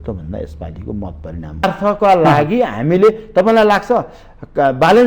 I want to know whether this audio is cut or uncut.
cut